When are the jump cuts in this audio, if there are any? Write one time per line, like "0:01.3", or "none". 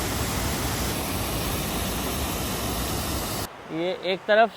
0:00.9
0:03.5